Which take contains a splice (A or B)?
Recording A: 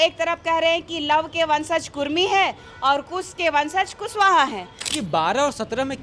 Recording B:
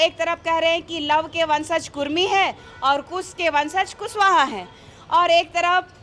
A